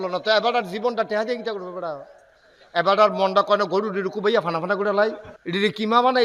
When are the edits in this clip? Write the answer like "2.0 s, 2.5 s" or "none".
5.3 s